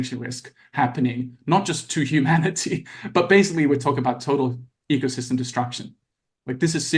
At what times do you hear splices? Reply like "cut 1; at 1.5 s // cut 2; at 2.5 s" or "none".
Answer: none

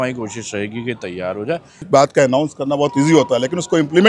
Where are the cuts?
cut 1; at 1.8 s

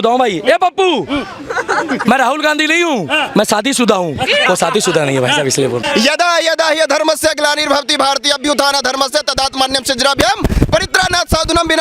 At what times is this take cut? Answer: cut 1; at 5.8 s

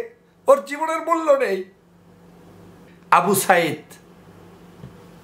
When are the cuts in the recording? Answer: cut 1; at 2.9 s

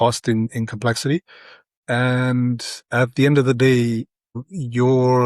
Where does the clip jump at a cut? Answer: cut 1; at 1.7 s // cut 2; at 2.7 s // cut 3; at 4.3 s

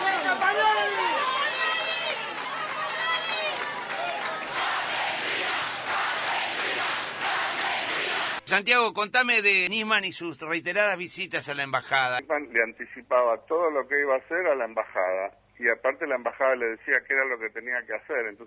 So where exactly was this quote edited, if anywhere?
cut 1; at 4.4 s // cut 2; at 9.7 s // cut 3; at 12.2 s

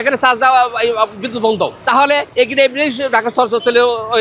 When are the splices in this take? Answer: none

